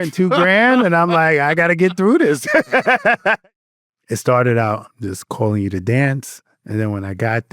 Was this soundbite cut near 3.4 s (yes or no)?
yes